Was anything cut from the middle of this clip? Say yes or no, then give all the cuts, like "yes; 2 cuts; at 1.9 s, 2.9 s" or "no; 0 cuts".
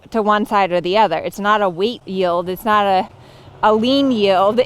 yes; 1 cut; at 2.0 s